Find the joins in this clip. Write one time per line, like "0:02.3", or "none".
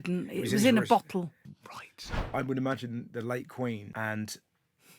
0:02.0
0:03.9